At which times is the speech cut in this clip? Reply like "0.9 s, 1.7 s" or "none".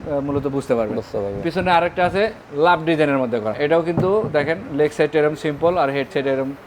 none